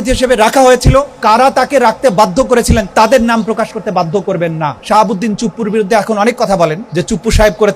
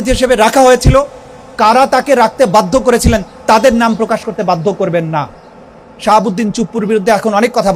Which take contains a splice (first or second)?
first